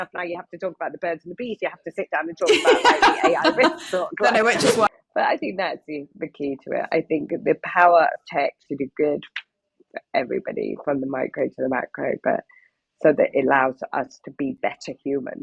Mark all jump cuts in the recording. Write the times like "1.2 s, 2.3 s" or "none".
4.9 s